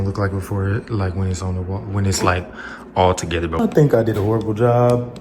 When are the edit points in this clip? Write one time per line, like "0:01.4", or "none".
0:03.6

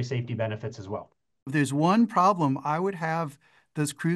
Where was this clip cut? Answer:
0:01.5

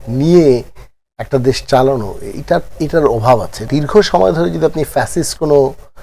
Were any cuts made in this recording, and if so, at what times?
0:03.6

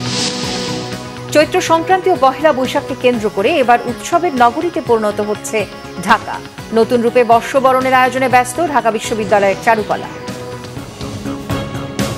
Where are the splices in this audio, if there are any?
0:11.0

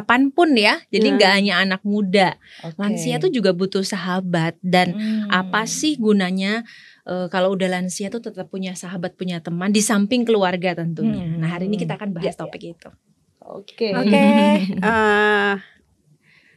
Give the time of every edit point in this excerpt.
none

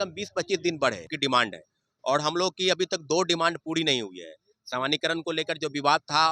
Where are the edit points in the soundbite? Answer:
0:01.1

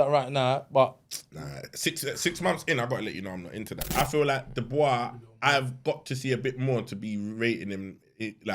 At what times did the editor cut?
0:03.9

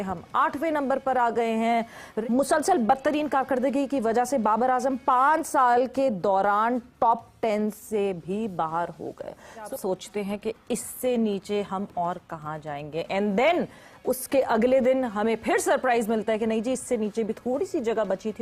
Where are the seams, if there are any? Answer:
0:02.1
0:09.7

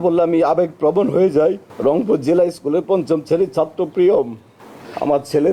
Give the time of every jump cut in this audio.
none

